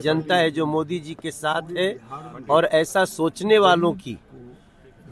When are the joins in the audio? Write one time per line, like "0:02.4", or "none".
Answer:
none